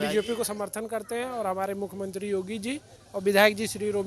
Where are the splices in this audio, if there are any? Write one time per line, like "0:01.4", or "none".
none